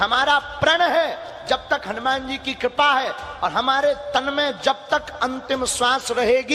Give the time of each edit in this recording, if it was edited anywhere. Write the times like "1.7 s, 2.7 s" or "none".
none